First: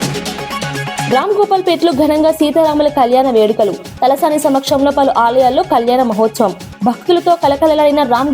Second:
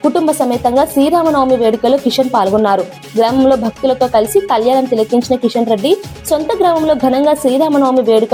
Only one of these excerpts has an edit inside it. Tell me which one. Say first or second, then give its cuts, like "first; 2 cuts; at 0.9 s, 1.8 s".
first; 1 cut; at 1.1 s